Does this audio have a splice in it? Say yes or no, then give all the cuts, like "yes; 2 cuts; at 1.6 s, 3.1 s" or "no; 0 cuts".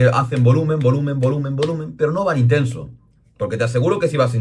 no; 0 cuts